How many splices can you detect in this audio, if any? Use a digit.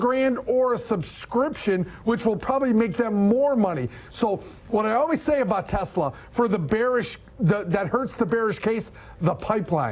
0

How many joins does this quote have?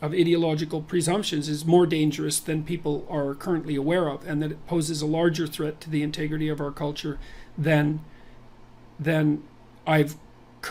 0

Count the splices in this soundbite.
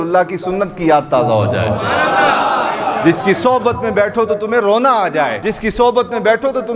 1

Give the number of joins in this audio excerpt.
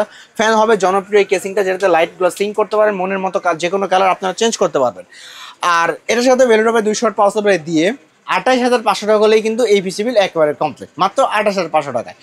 0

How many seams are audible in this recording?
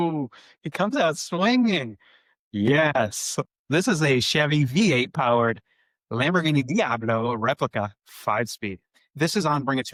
0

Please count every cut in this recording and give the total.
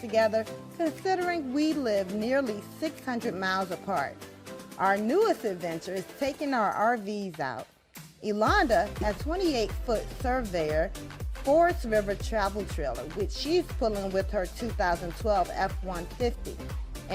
1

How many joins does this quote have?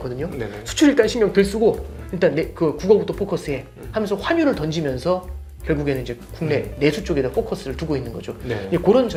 0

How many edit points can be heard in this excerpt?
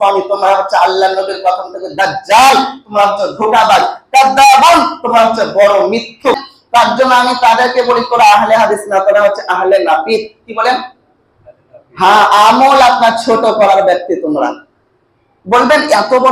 1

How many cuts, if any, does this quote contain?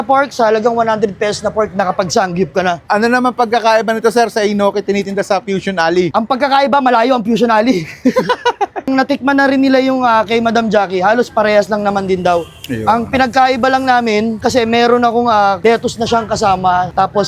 2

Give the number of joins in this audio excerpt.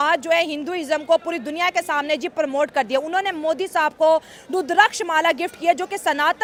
0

